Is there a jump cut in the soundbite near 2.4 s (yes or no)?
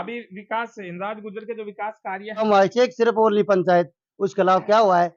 yes